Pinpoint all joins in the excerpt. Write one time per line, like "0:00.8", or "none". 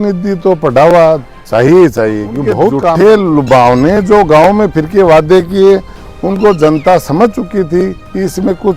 0:02.8